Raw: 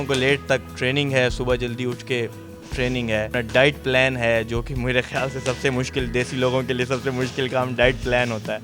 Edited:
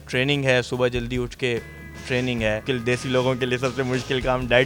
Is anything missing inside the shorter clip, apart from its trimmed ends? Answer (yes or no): yes